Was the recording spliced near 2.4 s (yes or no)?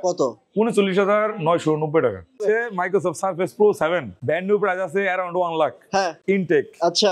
yes